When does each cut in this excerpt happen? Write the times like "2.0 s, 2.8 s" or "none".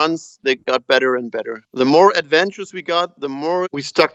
none